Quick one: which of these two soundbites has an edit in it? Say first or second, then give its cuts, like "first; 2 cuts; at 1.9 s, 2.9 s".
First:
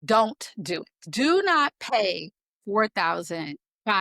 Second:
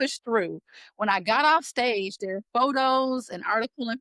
first; 1 cut; at 1.0 s